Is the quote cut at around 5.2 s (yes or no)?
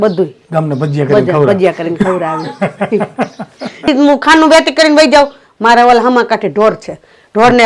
no